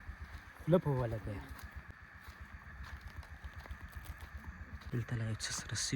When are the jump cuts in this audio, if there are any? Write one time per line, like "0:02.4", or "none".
0:01.9
0:04.8